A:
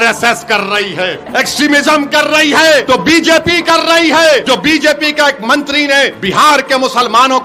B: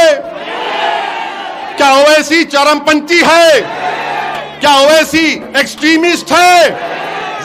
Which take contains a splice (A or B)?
A